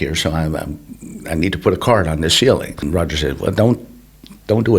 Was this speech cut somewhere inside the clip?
yes; 1 cut; at 2.8 s

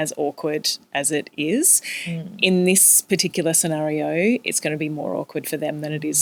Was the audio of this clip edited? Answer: no; 0 cuts

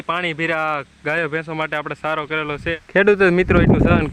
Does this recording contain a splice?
yes; 1 cut; at 2.8 s

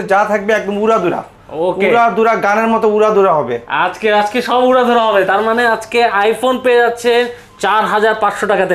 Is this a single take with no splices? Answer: yes; 0 cuts

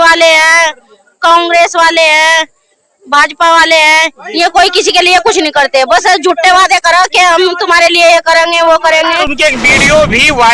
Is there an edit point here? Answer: yes; 1 cut; at 9.2 s

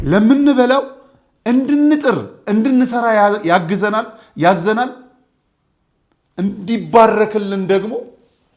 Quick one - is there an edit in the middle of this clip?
no; 0 cuts

